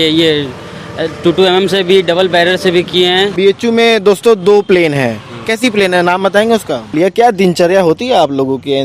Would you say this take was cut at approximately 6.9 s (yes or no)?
yes